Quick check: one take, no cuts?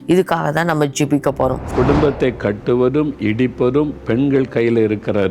no; 1 cut; at 1.7 s

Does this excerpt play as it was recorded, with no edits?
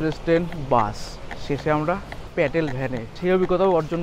no; 2 cuts; at 2.2 s, 3.1 s

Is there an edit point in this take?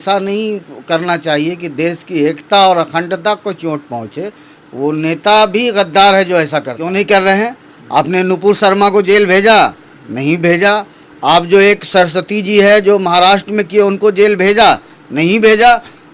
yes; 1 cut; at 6.8 s

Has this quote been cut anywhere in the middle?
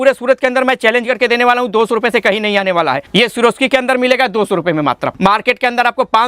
yes; 2 cuts; at 3.0 s, 5.1 s

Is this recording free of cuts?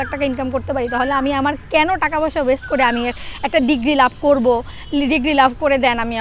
yes; 0 cuts

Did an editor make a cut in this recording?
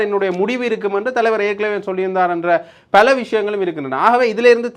no; 0 cuts

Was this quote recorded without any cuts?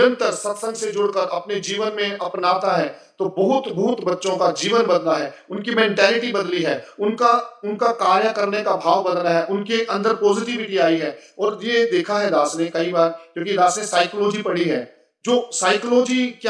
yes; 0 cuts

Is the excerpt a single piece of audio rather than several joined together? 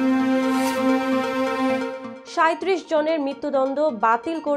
no; 1 cut; at 2.0 s

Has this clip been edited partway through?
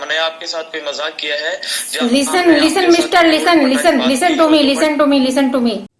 no; 0 cuts

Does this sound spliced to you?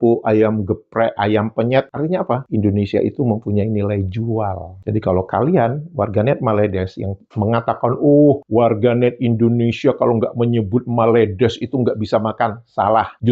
yes; 2 cuts; at 1.9 s, 4.7 s

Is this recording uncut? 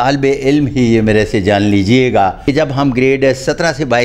no; 1 cut; at 2.4 s

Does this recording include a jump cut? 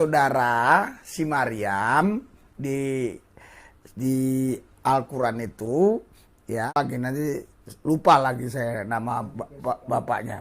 yes; 1 cut; at 6.7 s

